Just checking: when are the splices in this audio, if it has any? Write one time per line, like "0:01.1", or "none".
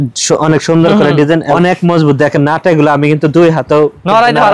0:01.5